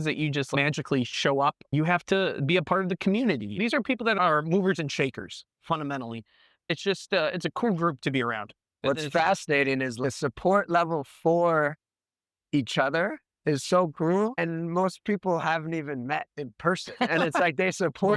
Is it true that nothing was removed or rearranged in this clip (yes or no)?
no